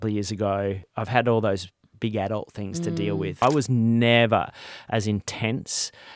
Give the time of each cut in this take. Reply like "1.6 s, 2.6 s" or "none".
0.9 s, 3.4 s